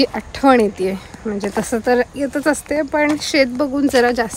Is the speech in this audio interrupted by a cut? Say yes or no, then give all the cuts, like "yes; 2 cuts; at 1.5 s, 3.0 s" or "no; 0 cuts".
no; 0 cuts